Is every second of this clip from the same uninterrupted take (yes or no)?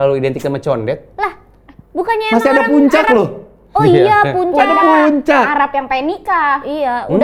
yes